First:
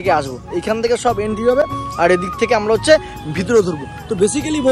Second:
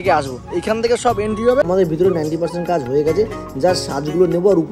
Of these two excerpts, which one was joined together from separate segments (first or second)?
second